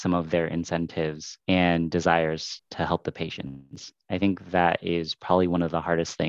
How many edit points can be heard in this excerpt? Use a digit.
2